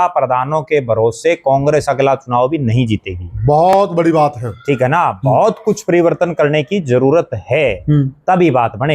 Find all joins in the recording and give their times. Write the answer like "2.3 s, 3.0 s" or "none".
none